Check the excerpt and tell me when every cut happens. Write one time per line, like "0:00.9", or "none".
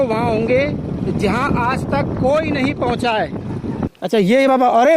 0:03.9